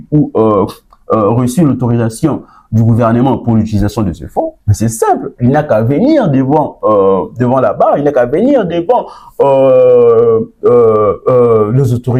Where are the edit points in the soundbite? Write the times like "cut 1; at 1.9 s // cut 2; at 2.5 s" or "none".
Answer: none